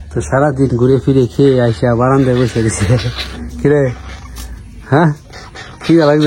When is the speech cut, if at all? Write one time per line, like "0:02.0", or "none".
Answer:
none